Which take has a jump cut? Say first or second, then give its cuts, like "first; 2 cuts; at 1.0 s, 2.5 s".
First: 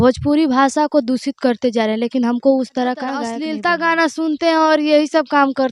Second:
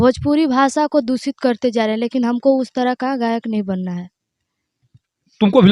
first; 1 cut; at 3.4 s